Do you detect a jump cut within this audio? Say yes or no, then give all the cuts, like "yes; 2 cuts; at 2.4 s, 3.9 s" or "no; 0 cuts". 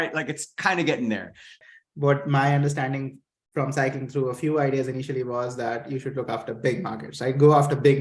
yes; 1 cut; at 1.5 s